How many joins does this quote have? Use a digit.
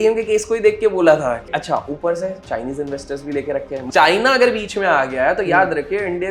2